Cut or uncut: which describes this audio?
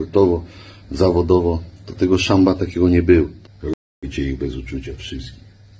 cut